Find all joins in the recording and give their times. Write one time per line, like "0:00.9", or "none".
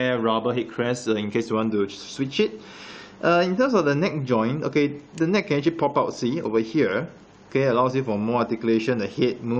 none

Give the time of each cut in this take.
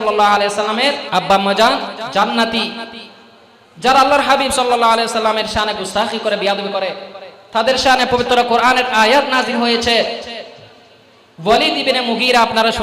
0:01.0

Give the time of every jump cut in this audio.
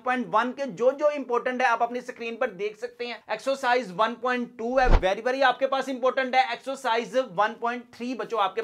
none

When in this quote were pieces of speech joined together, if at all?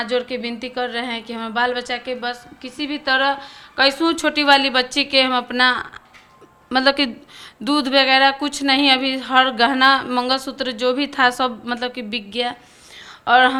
none

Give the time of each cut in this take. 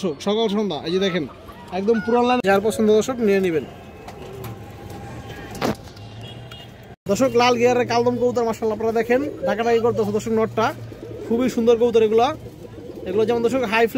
0:02.6
0:07.1

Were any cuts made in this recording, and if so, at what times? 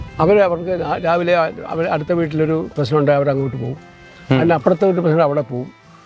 none

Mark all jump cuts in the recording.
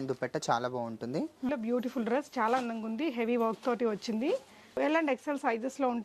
0:01.5
0:04.8

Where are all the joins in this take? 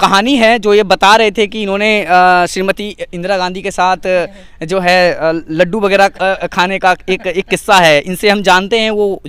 none

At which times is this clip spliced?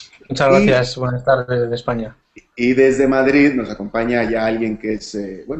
0:02.1

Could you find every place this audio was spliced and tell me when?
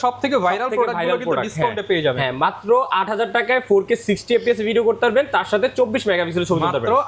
none

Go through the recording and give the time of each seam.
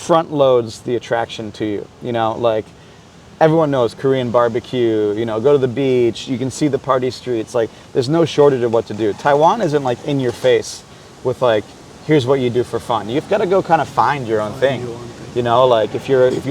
none

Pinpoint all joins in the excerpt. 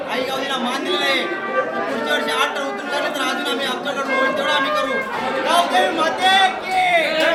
none

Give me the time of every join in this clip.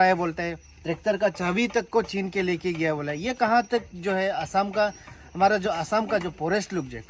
none

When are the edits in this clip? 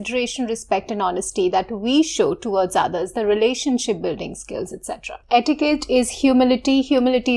0:05.2

